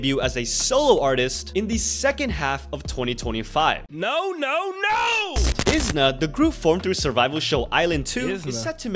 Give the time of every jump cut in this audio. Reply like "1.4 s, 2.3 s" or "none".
3.9 s, 5.5 s

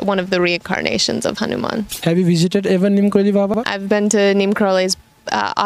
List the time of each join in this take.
1.9 s, 3.6 s

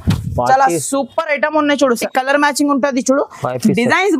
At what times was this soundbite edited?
2.0 s

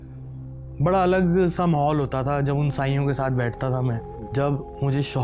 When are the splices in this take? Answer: 4.2 s

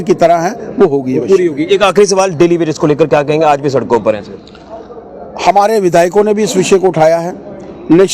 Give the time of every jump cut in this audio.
none

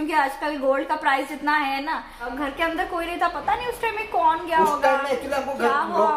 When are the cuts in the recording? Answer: 2.3 s

